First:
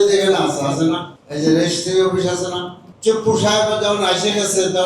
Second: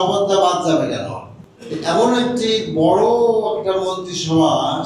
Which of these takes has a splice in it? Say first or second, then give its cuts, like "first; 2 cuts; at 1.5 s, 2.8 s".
first; 1 cut; at 2.8 s